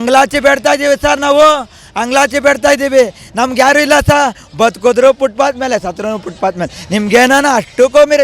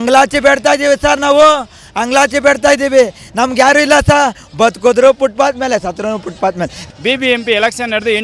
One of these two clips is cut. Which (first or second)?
second